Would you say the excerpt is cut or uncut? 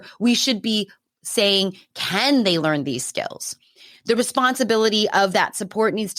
uncut